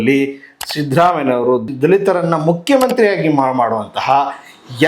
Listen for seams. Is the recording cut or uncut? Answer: cut